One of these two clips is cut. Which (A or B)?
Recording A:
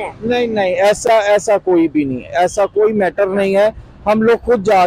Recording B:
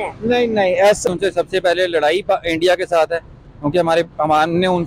B